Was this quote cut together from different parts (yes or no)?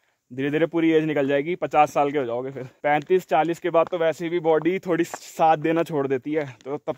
yes